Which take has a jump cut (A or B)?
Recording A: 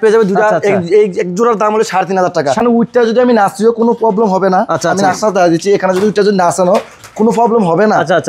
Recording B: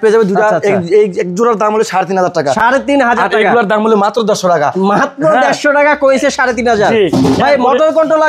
A